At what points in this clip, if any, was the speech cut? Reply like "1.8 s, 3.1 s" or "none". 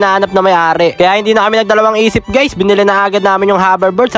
0.9 s